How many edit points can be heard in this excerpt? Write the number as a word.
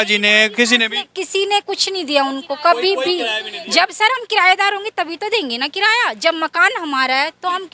zero